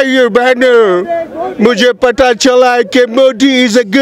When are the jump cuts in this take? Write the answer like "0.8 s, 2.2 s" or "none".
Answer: none